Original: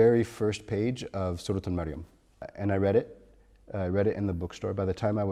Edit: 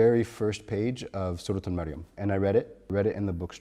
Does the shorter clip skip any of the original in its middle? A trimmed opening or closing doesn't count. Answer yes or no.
yes